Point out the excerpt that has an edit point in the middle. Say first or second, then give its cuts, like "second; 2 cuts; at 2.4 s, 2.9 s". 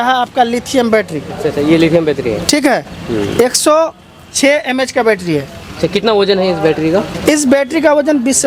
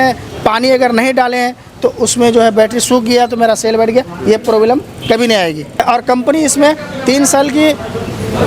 second; 1 cut; at 5.8 s